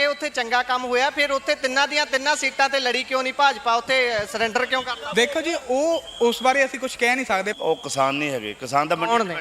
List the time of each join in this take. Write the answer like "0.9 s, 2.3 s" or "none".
7.5 s